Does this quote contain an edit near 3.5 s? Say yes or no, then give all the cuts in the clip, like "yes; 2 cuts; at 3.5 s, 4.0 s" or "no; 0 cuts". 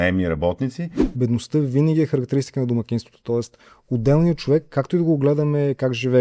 no; 1 cut; at 1.0 s